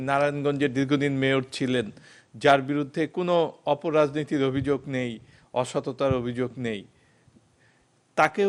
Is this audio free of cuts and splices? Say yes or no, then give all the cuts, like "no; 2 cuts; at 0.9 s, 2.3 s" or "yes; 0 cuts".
yes; 0 cuts